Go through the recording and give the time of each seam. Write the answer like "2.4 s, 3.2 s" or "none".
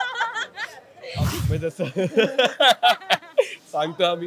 1.4 s